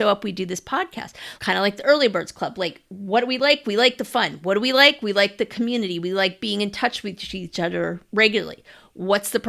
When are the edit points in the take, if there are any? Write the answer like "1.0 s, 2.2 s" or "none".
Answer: 1.3 s